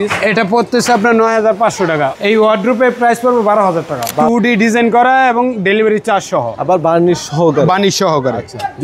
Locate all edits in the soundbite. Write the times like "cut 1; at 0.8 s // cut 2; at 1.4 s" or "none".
cut 1; at 2.1 s // cut 2; at 4.2 s